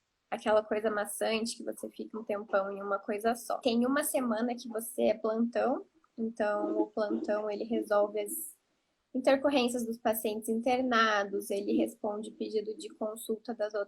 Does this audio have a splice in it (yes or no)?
yes